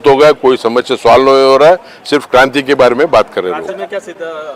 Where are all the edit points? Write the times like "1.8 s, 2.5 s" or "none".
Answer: none